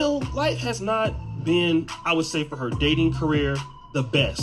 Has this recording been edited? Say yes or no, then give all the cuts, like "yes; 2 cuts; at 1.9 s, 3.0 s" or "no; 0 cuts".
no; 0 cuts